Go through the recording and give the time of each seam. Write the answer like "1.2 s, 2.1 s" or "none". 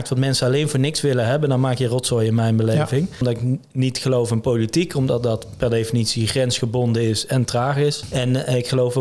3.2 s, 8.0 s